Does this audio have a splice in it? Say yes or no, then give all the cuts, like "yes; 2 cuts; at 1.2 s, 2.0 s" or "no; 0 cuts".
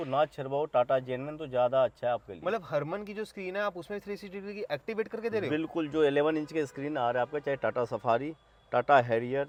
no; 0 cuts